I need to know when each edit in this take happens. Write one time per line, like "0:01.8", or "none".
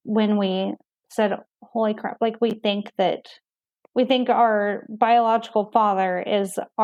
none